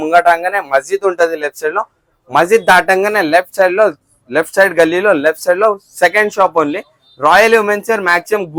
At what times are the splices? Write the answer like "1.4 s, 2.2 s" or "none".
none